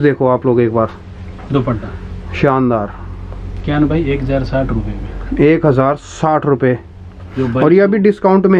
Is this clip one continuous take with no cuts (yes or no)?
yes